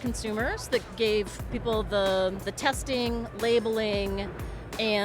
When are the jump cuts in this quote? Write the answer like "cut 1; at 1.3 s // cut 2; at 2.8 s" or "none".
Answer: cut 1; at 2.5 s

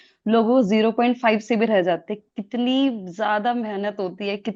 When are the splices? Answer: none

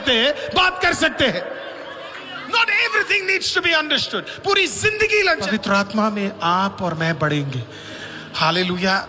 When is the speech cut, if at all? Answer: cut 1; at 5.5 s

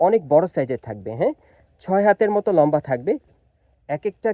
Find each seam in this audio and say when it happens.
cut 1; at 3.3 s

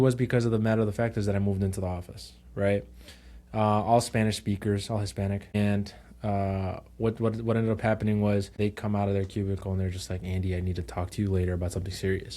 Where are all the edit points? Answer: cut 1; at 5.5 s // cut 2; at 8.6 s

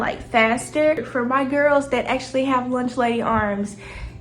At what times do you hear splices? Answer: cut 1; at 1.1 s

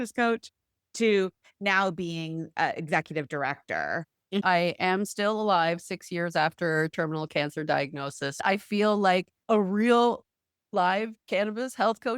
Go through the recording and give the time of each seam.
cut 1; at 4.4 s // cut 2; at 8.4 s // cut 3; at 9.3 s

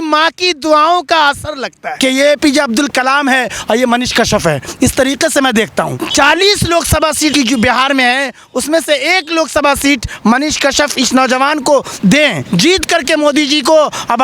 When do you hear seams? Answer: cut 1; at 1.9 s // cut 2; at 6.0 s // cut 3; at 7.3 s // cut 4; at 12.4 s

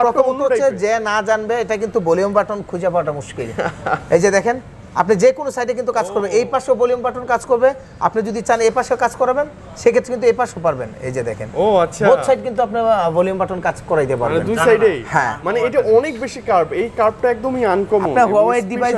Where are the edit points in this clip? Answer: none

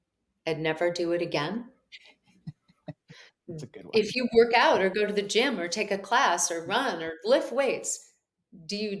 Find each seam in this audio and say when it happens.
none

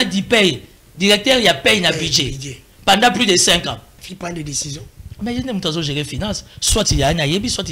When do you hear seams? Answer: cut 1; at 3.9 s

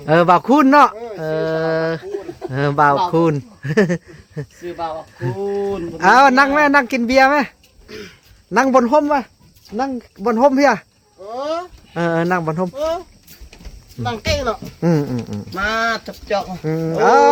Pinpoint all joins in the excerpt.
none

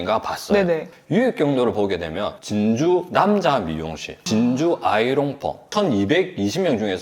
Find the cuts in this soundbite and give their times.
cut 1; at 4.1 s // cut 2; at 5.6 s

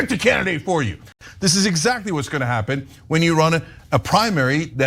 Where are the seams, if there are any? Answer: cut 1; at 1.1 s

